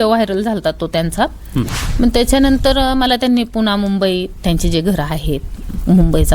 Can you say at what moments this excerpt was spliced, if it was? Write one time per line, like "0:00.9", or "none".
0:01.8